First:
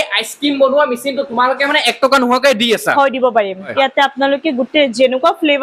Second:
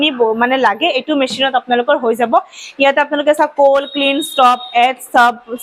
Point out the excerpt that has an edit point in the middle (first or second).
first